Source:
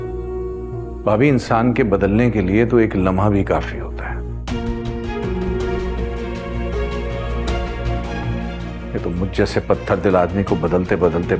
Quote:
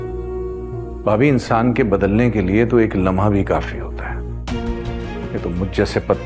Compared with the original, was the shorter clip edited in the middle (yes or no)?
yes